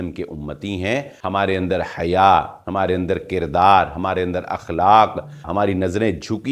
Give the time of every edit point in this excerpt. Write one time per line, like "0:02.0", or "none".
0:01.1
0:05.5